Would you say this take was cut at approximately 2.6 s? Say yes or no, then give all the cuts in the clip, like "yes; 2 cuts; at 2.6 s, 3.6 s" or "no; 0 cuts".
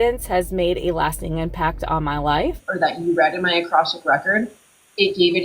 yes; 1 cut; at 2.6 s